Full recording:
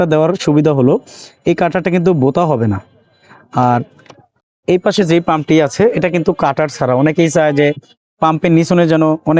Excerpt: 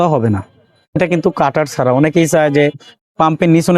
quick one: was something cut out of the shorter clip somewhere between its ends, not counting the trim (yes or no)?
yes